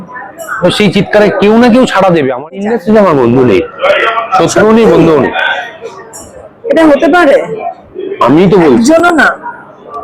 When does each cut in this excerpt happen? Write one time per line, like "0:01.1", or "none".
0:02.6